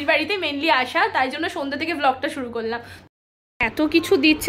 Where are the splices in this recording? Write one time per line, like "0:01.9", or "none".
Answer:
0:02.9